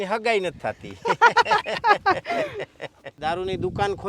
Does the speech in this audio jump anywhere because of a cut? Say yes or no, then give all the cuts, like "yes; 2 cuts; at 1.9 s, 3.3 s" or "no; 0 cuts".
yes; 1 cut; at 3.2 s